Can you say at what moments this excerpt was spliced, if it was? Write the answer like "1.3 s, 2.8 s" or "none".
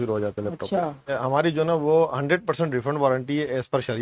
1.2 s